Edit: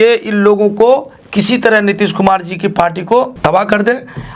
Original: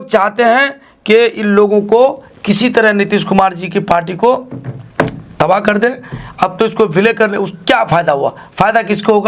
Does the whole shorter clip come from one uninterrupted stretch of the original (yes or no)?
no